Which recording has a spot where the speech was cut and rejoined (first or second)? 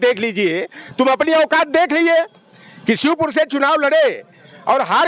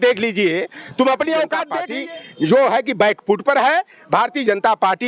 second